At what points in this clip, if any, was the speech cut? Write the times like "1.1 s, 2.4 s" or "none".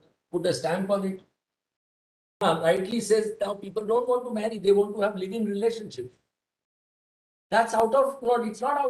2.4 s